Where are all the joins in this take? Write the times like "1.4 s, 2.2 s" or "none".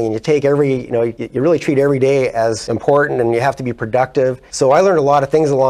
1.2 s, 2.7 s, 4.4 s